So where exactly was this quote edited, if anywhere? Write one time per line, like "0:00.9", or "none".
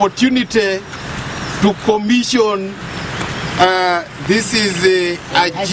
none